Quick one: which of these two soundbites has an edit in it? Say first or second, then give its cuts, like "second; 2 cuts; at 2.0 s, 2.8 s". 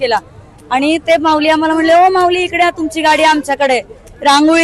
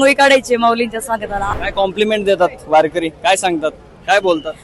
second; 1 cut; at 1.5 s